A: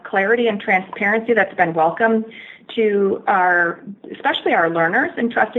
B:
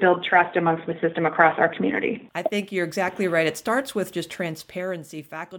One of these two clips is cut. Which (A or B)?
B